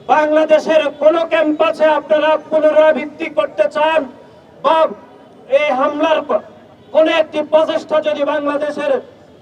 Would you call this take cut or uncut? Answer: uncut